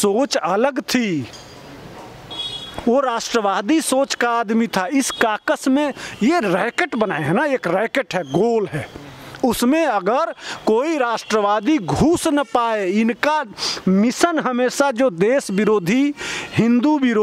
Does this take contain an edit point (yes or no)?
no